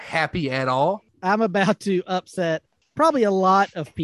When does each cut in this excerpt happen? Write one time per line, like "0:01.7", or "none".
0:01.1
0:02.8